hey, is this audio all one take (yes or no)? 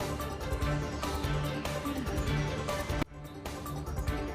no